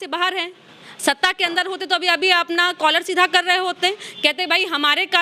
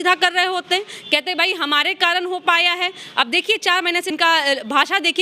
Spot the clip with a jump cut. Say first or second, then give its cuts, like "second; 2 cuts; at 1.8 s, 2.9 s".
second; 1 cut; at 4.1 s